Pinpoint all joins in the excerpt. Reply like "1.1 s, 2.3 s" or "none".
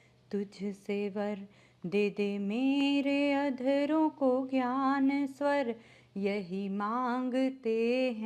none